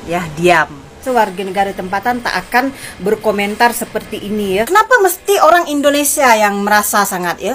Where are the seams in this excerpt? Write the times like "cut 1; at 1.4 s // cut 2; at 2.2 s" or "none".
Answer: cut 1; at 1.0 s // cut 2; at 4.7 s